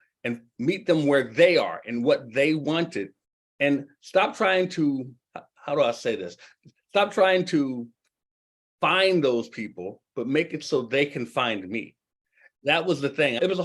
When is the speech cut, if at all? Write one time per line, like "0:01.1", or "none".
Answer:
0:12.6